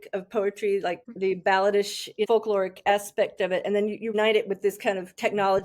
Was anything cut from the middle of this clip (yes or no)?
yes